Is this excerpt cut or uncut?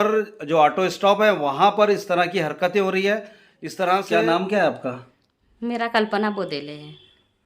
cut